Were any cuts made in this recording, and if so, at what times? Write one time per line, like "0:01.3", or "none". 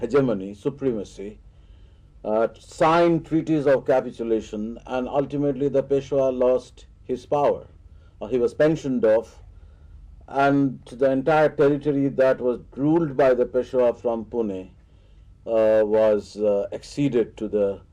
0:08.1